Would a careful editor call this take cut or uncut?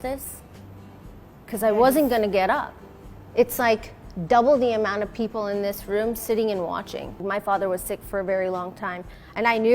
cut